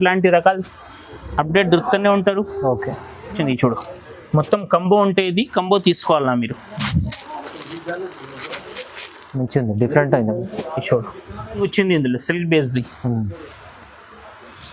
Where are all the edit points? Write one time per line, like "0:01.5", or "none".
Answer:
0:03.3
0:11.6